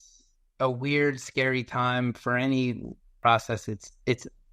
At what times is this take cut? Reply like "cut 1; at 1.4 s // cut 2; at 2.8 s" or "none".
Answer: cut 1; at 3.2 s